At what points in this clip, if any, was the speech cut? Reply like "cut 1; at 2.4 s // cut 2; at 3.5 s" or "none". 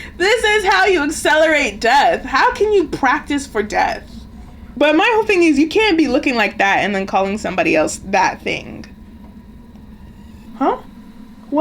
cut 1; at 4.6 s // cut 2; at 10.5 s